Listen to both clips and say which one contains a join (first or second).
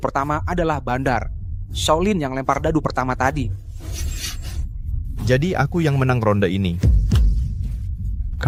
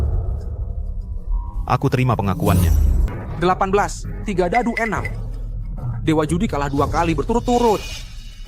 second